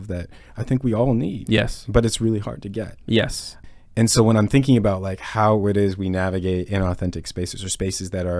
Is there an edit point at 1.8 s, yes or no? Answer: no